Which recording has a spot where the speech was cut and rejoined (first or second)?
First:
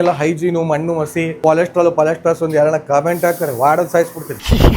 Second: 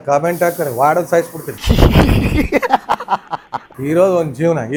first